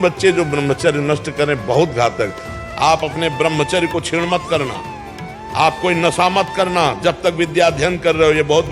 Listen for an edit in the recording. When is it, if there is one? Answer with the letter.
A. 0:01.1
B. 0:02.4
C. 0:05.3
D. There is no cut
B